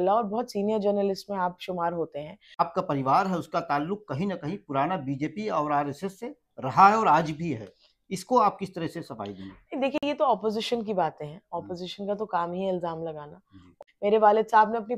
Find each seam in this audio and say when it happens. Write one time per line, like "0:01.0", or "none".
0:02.6
0:13.7

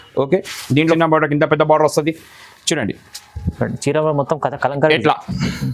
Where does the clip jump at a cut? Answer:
0:01.0

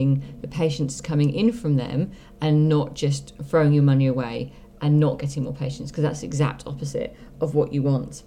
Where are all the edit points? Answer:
0:03.3

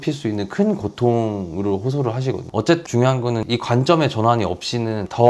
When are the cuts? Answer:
0:02.4

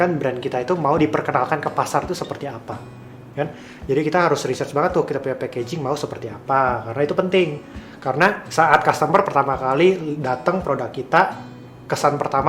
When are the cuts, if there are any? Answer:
0:01.0
0:08.4

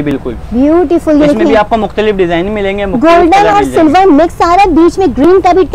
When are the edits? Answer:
none

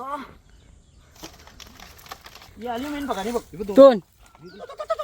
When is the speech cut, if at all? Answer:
0:02.5

